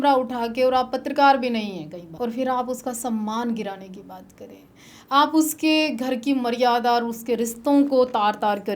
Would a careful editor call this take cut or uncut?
cut